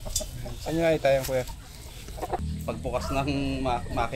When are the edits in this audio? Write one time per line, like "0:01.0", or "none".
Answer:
0:02.4